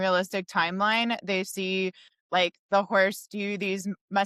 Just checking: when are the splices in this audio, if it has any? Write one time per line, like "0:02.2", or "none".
none